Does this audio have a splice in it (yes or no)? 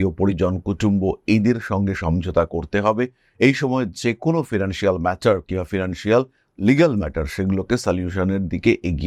no